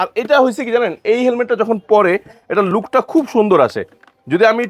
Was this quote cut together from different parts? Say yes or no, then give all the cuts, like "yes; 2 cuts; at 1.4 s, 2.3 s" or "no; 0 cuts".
no; 0 cuts